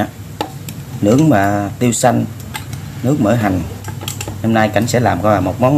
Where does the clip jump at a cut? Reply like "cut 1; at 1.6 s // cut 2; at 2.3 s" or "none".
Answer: none